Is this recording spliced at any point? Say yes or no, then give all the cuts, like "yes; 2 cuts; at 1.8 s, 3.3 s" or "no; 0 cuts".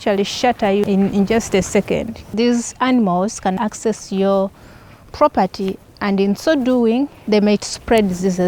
yes; 4 cuts; at 0.8 s, 2.3 s, 3.6 s, 7.2 s